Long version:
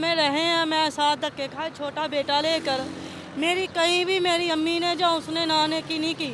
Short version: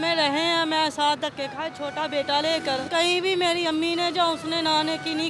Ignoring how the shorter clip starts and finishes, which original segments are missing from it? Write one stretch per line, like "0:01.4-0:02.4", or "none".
0:02.9-0:03.7